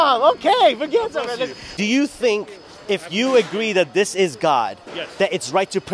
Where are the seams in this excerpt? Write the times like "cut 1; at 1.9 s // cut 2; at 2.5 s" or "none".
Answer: cut 1; at 1.6 s